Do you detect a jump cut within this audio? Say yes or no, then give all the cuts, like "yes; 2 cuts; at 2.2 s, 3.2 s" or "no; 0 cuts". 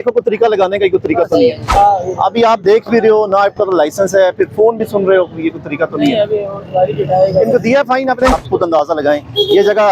yes; 2 cuts; at 1.7 s, 8.4 s